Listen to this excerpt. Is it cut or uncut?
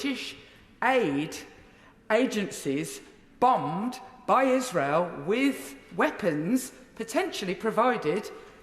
uncut